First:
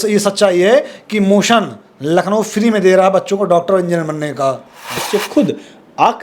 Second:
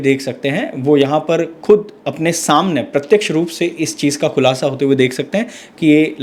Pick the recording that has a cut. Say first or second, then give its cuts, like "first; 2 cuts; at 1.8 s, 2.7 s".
first; 1 cut; at 5.0 s